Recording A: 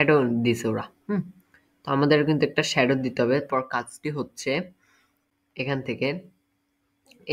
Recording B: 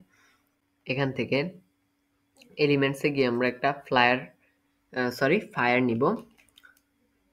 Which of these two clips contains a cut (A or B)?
A